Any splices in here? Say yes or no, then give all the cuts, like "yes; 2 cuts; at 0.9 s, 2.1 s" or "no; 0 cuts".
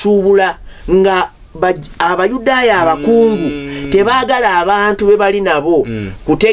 no; 0 cuts